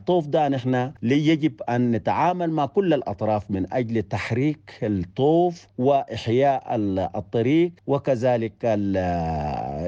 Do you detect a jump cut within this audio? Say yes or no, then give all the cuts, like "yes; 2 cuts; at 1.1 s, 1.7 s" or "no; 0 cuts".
yes; 3 cuts; at 0.9 s, 5.7 s, 7.8 s